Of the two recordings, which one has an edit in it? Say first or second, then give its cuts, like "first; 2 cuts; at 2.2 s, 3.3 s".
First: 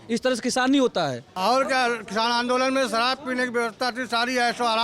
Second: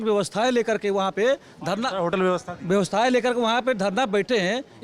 first; 1 cut; at 1.2 s